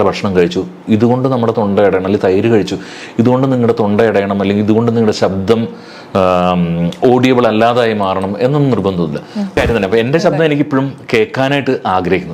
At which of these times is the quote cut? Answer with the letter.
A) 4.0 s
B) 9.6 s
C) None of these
B